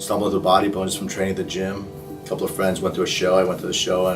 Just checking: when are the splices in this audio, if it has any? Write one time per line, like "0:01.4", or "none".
none